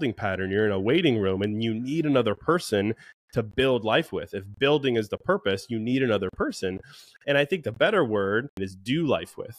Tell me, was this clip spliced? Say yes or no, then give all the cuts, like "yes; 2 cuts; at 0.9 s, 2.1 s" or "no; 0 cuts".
yes; 1 cut; at 8.7 s